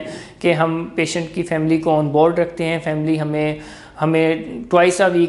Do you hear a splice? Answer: no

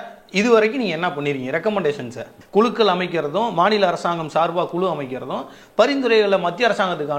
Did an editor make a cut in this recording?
yes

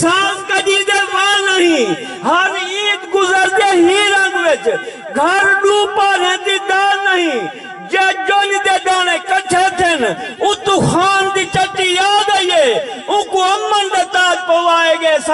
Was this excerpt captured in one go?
yes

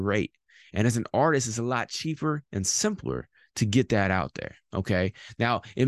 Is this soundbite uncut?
yes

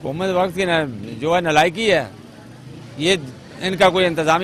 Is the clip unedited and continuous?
yes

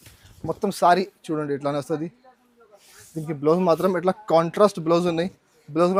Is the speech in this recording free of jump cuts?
yes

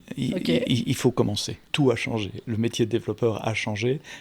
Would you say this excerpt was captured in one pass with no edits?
no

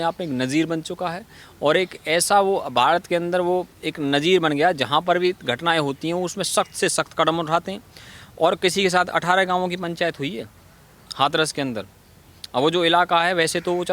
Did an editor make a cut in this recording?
no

